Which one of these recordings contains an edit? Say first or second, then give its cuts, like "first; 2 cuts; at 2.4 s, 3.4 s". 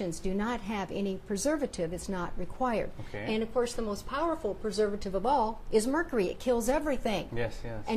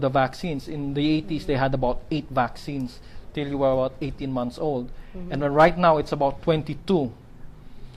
first; 1 cut; at 2.5 s